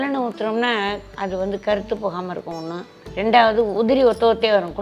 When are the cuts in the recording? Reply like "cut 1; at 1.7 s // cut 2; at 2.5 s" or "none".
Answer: cut 1; at 1.1 s